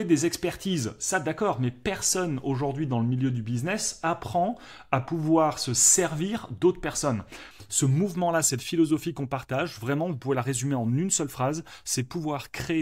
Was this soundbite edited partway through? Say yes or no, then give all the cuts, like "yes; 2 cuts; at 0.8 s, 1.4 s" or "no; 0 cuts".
yes; 1 cut; at 7.5 s